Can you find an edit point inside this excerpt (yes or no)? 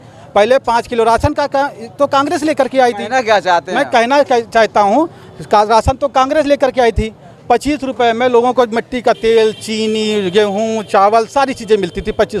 no